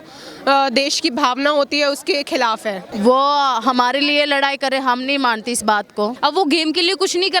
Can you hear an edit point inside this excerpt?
yes; 2 cuts; at 2.9 s, 6.2 s

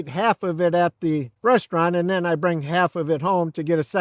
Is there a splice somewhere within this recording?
no; 0 cuts

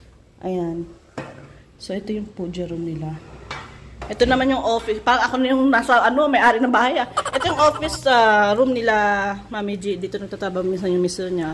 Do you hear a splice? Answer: no; 0 cuts

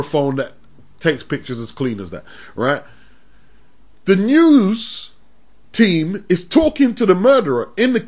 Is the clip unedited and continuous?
yes; 0 cuts

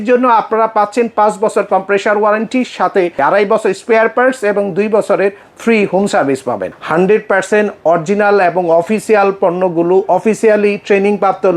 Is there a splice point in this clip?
yes; 2 cuts; at 3.2 s, 6.7 s

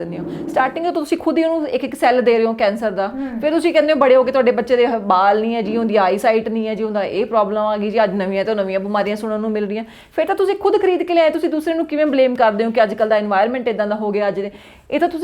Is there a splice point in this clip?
no; 0 cuts

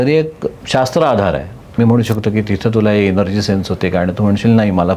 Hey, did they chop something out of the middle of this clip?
yes; 1 cut; at 1.8 s

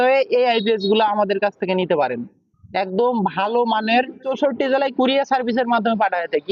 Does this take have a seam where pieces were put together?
yes; 1 cut; at 4.3 s

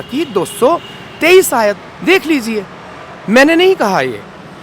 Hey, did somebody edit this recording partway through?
no; 0 cuts

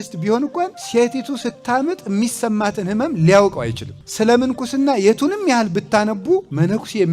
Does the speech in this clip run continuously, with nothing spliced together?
yes; 0 cuts

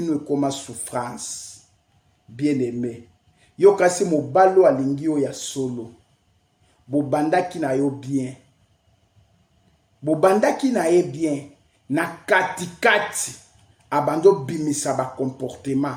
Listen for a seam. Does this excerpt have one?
no; 0 cuts

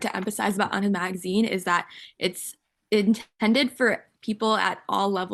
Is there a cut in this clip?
no; 0 cuts

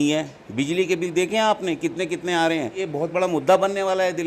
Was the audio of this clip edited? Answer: yes; 1 cut; at 2.8 s

